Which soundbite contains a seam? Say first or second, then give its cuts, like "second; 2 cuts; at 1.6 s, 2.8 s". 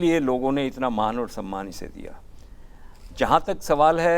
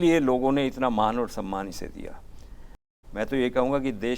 second; 1 cut; at 3.0 s